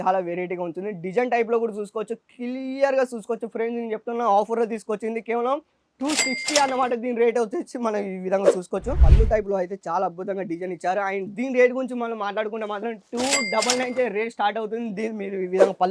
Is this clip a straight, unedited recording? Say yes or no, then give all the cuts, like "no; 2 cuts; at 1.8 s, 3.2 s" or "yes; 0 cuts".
no; 1 cut; at 9.0 s